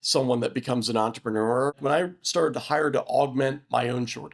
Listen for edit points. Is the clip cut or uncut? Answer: cut